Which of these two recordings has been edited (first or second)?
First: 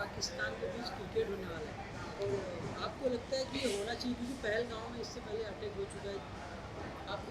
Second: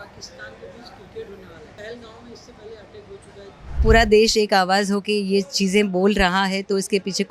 second